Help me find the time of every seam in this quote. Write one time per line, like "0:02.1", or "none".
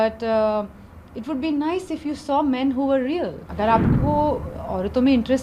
0:03.4